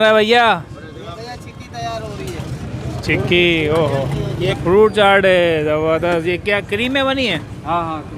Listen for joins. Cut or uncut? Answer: cut